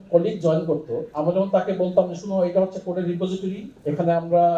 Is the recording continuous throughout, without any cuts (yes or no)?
yes